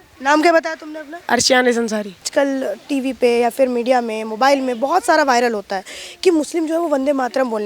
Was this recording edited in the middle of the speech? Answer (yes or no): yes